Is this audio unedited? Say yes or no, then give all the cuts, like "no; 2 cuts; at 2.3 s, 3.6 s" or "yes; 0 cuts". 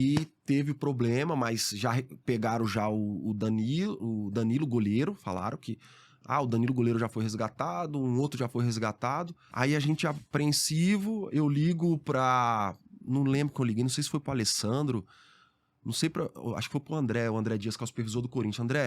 no; 1 cut; at 9.4 s